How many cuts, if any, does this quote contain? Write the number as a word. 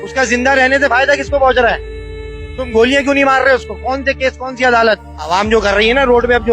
one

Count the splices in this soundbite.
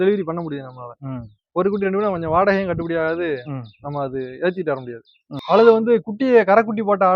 one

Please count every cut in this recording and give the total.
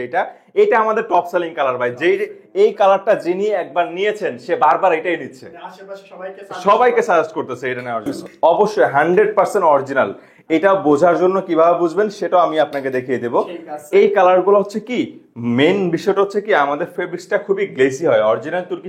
one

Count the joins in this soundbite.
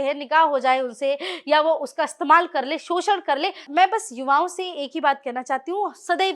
one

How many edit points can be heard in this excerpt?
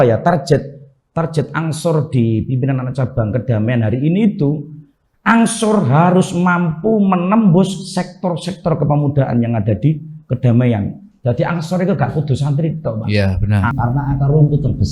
one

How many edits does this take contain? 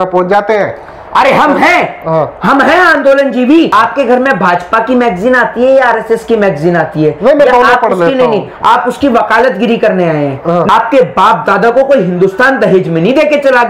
two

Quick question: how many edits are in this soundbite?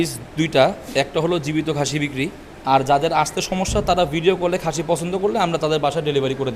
one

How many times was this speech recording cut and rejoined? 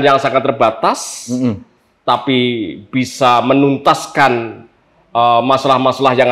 zero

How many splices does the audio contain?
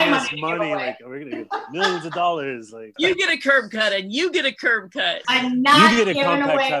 two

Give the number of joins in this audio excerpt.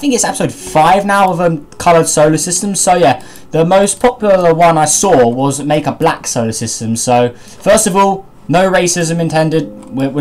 one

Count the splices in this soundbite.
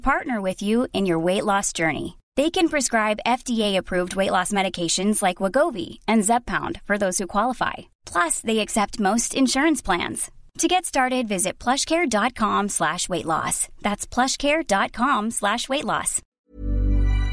one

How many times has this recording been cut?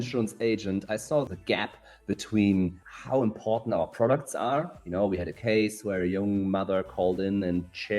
two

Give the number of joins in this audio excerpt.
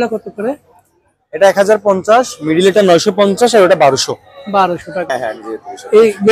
one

